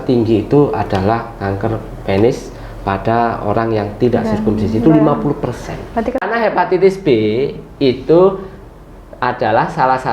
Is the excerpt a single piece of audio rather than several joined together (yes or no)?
no